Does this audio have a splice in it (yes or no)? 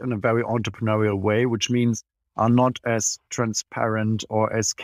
no